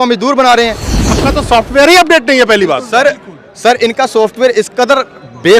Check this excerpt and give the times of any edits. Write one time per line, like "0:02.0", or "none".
0:01.1